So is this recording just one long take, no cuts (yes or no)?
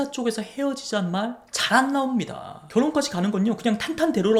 yes